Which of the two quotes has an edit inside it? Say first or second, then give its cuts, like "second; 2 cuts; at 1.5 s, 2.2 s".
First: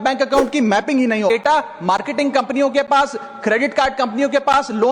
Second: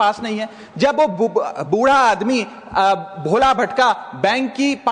first; 1 cut; at 1.3 s